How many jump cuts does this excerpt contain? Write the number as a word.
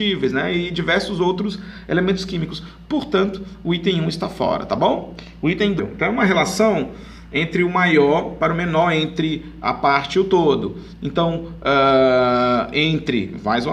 zero